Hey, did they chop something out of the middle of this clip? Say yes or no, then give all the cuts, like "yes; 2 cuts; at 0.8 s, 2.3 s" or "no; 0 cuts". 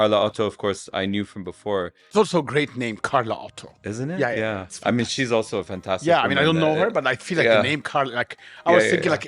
yes; 1 cut; at 2.0 s